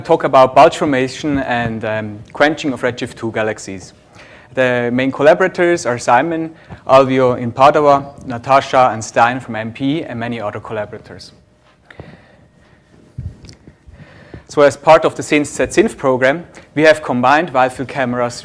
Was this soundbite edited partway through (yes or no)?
yes